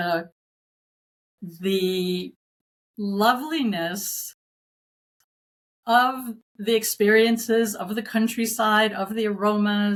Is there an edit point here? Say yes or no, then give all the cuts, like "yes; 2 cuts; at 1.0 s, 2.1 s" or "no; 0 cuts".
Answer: no; 0 cuts